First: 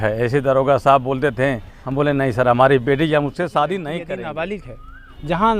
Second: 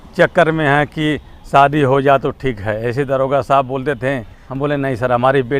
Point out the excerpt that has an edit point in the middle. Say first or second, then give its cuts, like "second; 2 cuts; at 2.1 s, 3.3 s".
first; 1 cut; at 4.0 s